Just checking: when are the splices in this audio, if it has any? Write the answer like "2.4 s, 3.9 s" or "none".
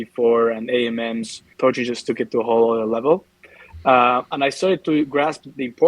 1.4 s